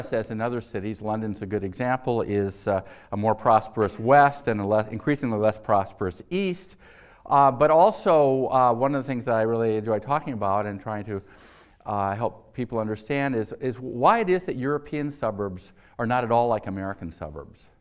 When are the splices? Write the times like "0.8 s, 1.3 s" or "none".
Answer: 8.0 s